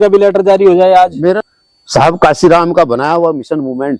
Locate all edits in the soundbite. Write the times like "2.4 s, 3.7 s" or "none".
1.4 s